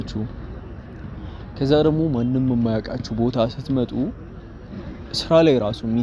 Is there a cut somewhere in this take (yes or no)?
no